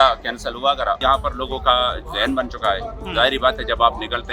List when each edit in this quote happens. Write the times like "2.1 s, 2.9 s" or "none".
1.0 s